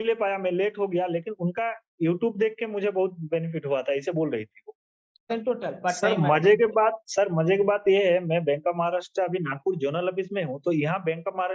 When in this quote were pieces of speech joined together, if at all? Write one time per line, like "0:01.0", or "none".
0:05.3